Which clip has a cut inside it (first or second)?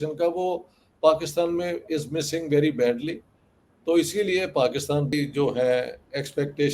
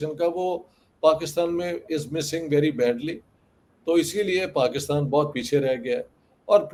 first